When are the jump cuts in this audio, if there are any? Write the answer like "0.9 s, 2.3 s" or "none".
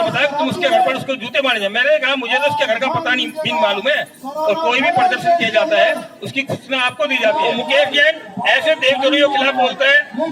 7.6 s